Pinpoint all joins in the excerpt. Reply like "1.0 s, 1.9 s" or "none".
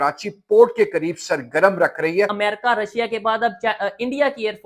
2.3 s